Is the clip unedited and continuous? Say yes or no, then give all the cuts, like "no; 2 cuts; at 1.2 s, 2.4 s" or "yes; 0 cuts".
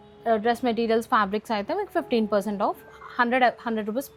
yes; 0 cuts